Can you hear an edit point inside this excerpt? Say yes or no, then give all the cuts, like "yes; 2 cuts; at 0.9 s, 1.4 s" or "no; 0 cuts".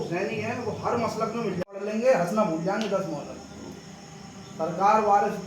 yes; 1 cut; at 1.7 s